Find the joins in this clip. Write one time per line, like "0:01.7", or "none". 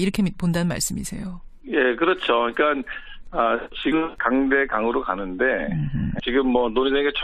none